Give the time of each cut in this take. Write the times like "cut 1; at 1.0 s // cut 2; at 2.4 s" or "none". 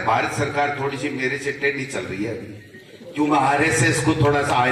none